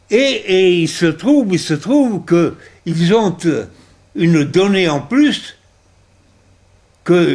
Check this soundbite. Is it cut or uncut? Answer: cut